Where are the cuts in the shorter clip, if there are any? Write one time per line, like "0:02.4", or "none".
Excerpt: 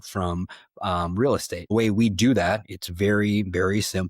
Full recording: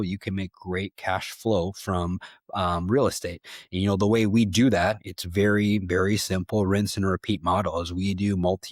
0:01.7